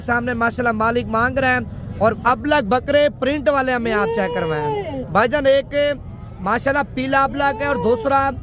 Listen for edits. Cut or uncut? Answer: cut